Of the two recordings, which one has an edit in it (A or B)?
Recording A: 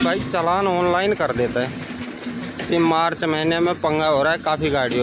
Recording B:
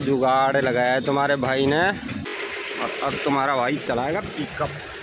B